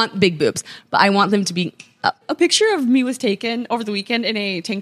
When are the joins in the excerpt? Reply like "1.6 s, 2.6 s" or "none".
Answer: 2.3 s